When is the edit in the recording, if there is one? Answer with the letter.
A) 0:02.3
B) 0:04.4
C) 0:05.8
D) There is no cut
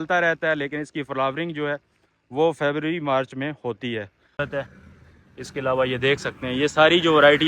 B